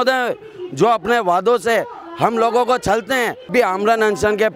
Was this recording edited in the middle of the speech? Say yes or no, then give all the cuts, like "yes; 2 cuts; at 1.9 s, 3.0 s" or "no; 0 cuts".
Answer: yes; 1 cut; at 3.5 s